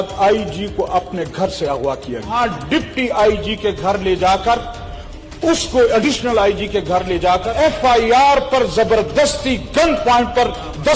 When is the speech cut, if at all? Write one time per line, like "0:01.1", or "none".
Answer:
0:02.3
0:07.5